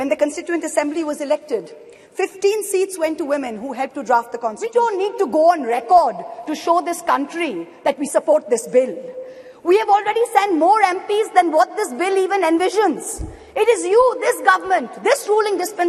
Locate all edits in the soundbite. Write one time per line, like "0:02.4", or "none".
0:04.6